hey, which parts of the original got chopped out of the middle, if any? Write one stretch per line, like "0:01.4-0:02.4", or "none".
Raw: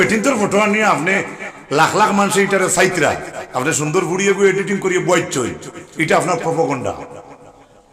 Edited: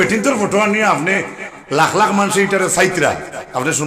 none